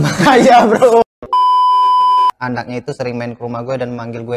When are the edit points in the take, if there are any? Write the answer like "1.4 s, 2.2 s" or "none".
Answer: 1.2 s, 2.4 s